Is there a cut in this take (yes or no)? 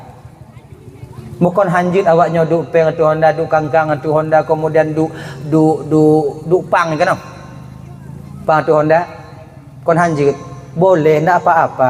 no